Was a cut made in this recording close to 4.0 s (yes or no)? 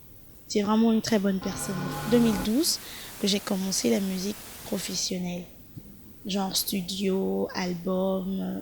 no